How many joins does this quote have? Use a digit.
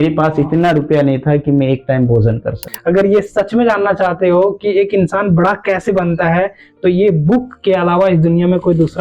1